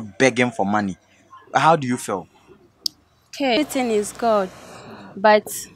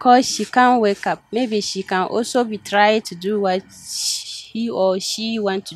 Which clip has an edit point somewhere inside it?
first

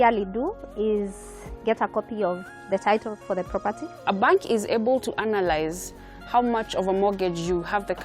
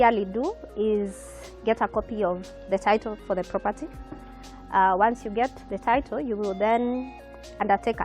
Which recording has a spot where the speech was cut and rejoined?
first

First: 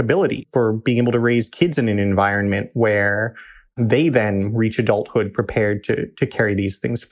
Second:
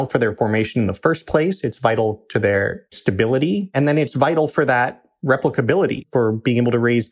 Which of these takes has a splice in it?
second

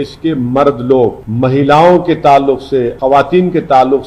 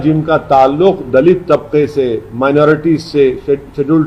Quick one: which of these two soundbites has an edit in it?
first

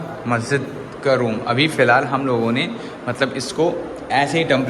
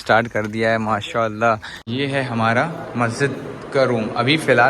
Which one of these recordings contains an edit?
second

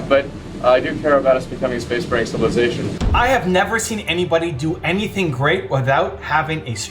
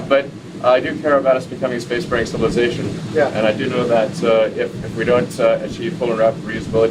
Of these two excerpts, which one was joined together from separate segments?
first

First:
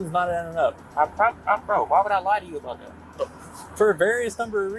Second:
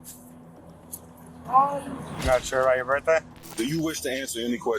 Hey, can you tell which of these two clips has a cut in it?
second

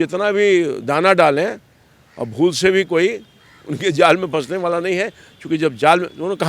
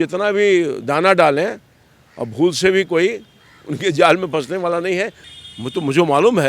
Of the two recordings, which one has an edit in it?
second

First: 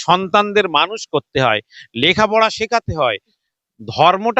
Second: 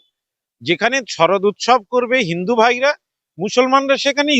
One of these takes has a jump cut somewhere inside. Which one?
first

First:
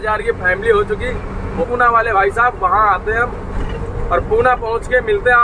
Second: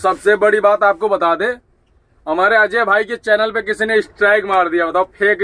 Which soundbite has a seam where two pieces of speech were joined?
first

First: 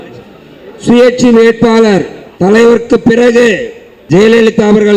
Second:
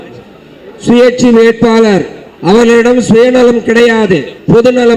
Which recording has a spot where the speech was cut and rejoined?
first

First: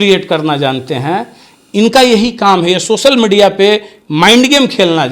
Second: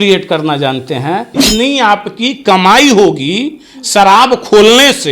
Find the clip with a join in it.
second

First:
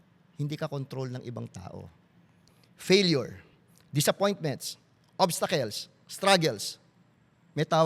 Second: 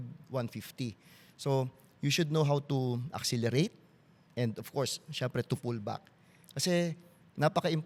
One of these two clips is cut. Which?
first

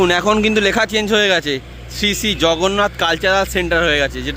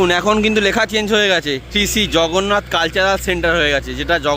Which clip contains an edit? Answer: second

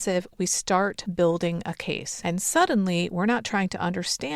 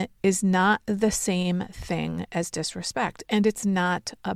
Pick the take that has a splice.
first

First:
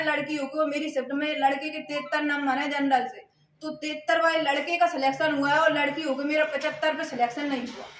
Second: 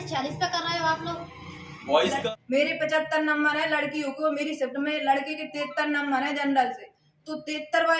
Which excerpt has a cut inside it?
second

